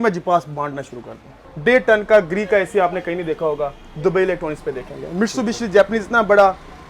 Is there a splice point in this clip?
yes; 1 cut; at 1.5 s

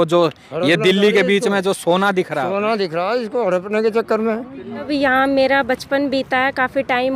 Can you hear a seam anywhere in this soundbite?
yes; 1 cut; at 4.9 s

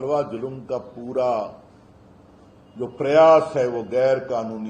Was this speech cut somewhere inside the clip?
no; 0 cuts

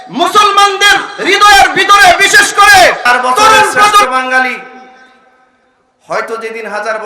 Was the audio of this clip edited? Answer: yes; 1 cut; at 4.1 s

